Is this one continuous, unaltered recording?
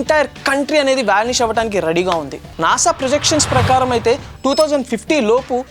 no; 1 cut; at 2.4 s

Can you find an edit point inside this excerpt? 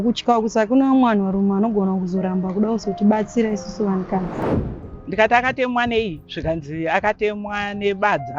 yes; 1 cut; at 4.5 s

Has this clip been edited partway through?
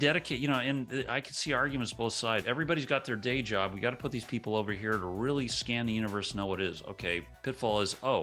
yes; 2 cuts; at 2.4 s, 7.3 s

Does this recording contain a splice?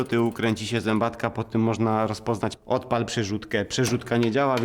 yes; 1 cut; at 2.6 s

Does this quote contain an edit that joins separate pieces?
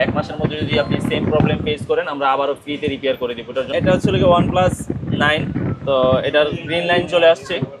yes; 1 cut; at 3.7 s

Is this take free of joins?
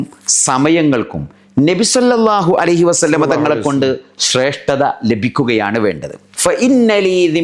no; 1 cut; at 6.3 s

